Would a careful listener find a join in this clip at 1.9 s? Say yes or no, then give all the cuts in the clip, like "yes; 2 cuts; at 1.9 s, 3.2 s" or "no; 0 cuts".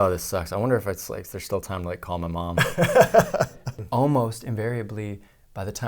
no; 1 cut; at 3.8 s